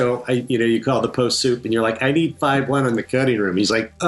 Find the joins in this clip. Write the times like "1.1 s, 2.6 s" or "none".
none